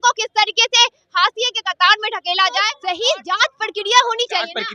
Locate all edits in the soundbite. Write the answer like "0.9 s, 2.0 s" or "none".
2.7 s